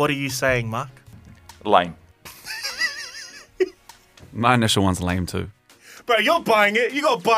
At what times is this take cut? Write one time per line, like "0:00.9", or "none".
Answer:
none